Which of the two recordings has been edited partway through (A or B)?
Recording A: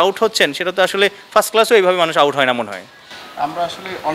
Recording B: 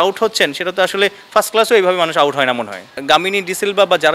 B